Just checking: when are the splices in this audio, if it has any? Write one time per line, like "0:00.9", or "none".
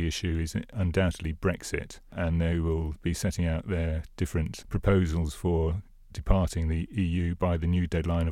0:00.8
0:02.1
0:04.6
0:06.9

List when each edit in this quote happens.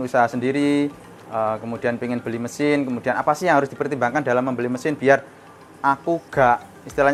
none

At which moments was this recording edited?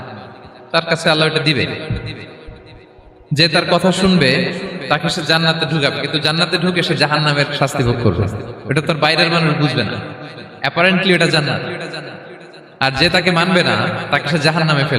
none

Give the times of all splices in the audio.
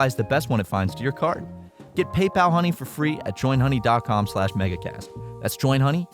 0:01.6

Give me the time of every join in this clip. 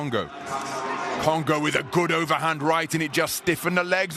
none

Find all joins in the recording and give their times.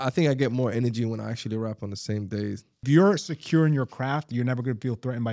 0:02.8

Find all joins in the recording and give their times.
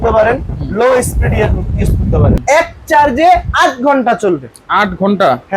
0:02.4

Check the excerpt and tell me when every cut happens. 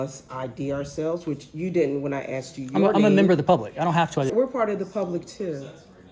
0:04.3

